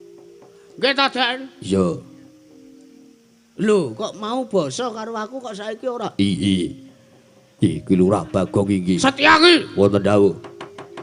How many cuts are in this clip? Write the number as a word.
one